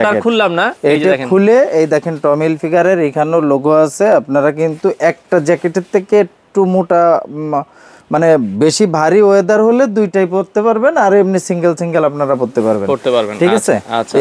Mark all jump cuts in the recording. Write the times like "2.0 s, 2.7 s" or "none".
none